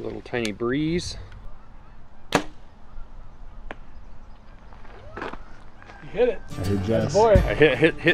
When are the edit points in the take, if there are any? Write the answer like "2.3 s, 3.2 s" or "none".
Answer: 4.4 s